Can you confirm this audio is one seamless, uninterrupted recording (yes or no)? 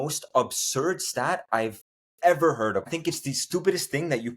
no